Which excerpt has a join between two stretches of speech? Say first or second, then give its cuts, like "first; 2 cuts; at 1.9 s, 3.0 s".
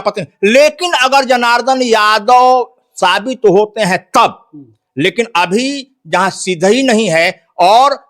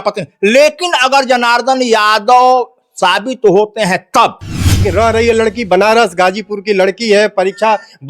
second; 1 cut; at 4.8 s